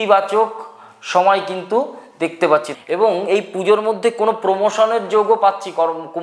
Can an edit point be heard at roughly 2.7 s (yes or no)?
yes